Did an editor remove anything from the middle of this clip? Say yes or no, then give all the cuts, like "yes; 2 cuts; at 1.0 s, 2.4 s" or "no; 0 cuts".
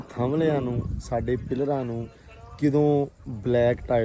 no; 0 cuts